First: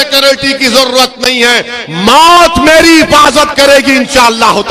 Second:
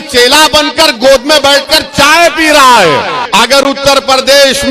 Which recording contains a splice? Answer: second; 1 cut; at 3.2 s

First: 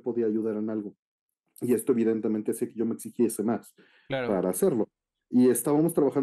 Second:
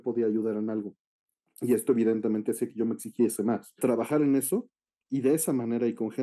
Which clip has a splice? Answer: second; 1 cut; at 3.7 s

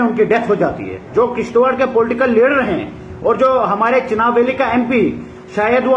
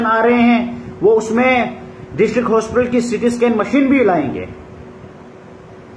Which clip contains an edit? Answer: first; 1 cut; at 1.1 s

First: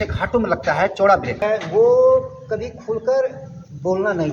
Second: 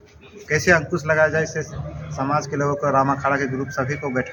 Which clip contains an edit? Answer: first; 1 cut; at 1.4 s

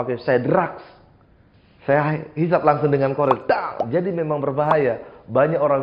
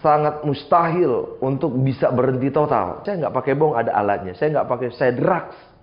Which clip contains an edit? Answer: second; 1 cut; at 3.1 s

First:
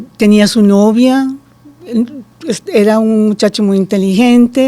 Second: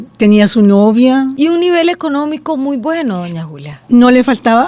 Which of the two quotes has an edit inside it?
second; 1 cut; at 1.3 s

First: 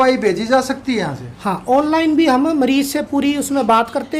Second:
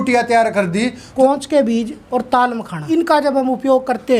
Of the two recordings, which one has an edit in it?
second; 3 cuts; at 1.1 s, 2.0 s, 2.8 s

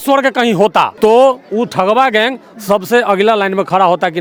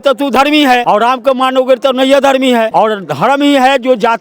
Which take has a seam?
second; 2 cuts; at 0.8 s, 2.7 s

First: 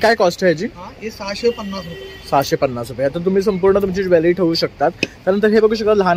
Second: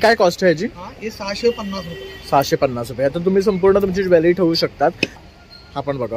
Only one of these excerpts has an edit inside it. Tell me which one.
second; 1 cut; at 5.2 s

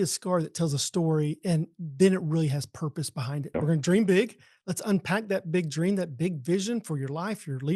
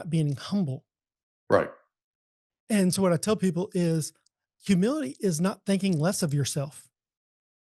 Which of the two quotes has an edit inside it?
first; 1 cut; at 3.5 s

